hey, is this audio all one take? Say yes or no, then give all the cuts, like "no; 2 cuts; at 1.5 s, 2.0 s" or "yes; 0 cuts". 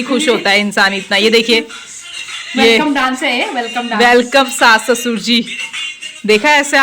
yes; 0 cuts